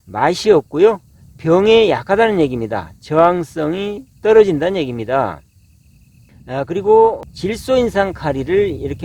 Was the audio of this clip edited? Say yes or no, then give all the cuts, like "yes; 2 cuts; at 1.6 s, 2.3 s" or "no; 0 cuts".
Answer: no; 0 cuts